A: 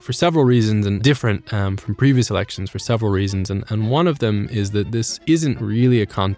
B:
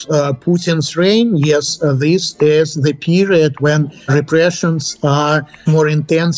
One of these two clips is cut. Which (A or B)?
A